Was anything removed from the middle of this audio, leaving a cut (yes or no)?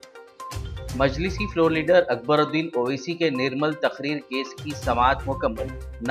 yes